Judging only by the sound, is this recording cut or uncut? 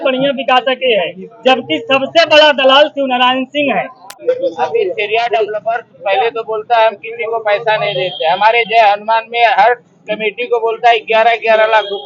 cut